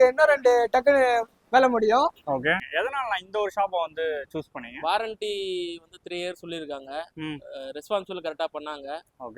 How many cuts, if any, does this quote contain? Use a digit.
1